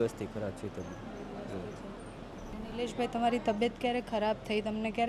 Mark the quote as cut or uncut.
cut